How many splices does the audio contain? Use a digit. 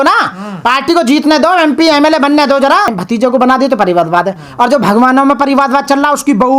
1